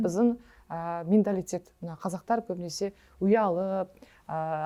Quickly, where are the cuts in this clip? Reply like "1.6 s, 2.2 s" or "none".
none